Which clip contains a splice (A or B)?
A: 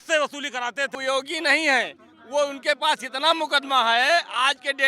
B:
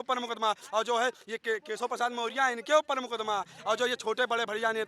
A